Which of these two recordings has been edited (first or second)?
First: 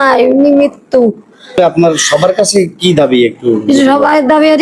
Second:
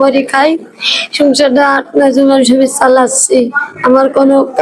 first